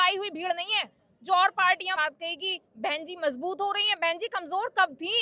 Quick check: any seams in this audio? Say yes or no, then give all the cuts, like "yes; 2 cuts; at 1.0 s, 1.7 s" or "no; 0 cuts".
yes; 1 cut; at 2.0 s